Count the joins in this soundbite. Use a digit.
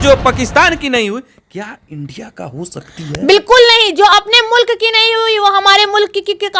0